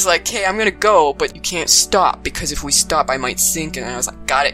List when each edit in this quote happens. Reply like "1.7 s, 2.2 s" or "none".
1.3 s